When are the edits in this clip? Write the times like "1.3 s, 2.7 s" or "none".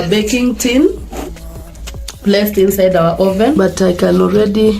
3.6 s